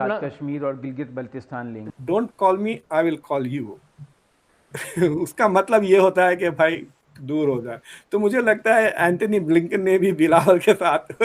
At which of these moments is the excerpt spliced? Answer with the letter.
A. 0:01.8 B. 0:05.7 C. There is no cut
A